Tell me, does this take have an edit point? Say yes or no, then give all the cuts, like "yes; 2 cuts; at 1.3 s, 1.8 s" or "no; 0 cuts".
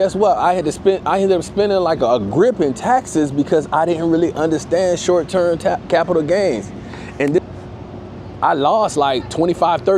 yes; 1 cut; at 7.4 s